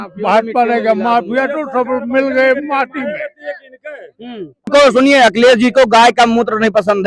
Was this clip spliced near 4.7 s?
yes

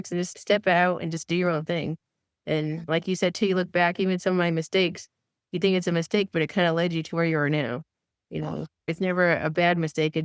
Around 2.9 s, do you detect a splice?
yes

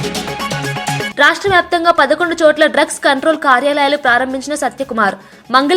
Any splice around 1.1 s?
yes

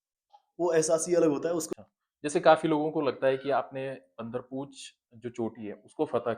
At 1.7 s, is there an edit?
yes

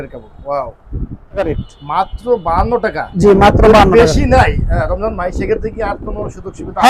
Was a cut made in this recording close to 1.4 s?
yes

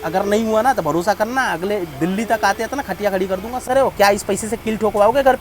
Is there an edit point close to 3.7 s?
yes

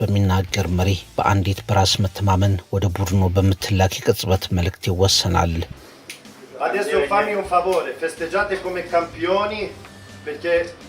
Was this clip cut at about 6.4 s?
yes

